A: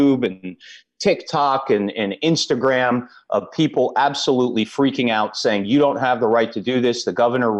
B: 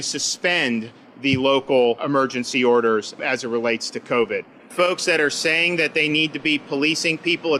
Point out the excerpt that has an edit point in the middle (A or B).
B